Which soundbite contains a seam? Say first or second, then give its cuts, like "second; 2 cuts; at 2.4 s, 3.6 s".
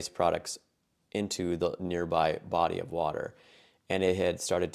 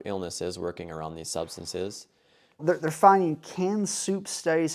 second; 1 cut; at 2.6 s